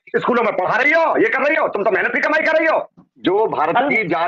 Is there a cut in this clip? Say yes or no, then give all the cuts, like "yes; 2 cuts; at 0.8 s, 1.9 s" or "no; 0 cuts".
yes; 1 cut; at 3.0 s